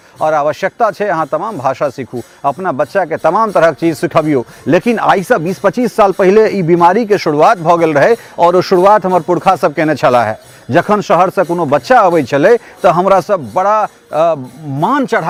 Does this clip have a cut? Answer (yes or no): no